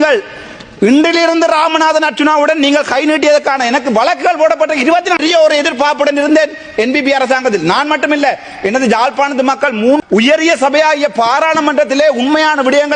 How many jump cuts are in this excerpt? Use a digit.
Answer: 2